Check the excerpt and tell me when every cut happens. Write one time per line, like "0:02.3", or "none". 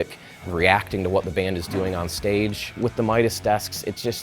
0:02.7